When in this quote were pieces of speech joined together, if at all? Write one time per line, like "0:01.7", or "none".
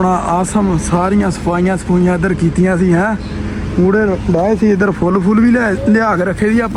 none